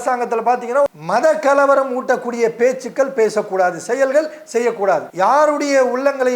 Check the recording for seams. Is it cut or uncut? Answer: cut